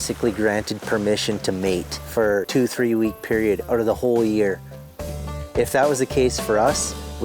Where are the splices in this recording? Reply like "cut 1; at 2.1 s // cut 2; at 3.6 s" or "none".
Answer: cut 1; at 2.4 s // cut 2; at 5.2 s